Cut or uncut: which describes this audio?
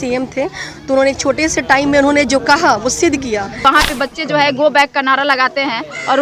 cut